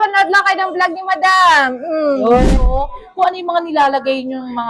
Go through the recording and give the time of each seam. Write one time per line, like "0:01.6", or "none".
0:02.4